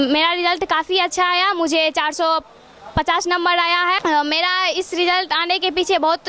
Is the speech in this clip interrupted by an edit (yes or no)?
no